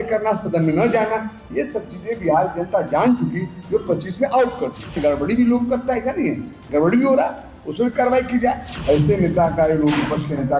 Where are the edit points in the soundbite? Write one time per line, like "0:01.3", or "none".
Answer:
0:05.0
0:08.7